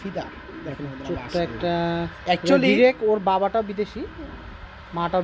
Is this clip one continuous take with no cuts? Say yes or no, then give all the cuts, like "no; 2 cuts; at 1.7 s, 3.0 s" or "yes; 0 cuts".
yes; 0 cuts